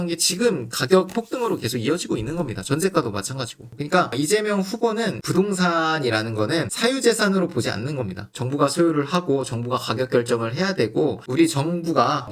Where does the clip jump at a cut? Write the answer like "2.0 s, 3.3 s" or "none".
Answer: 3.6 s, 11.2 s